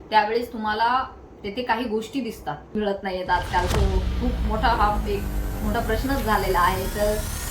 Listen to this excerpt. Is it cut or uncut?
cut